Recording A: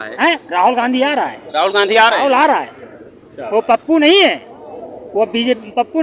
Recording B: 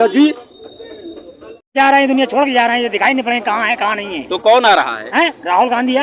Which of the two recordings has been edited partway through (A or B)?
B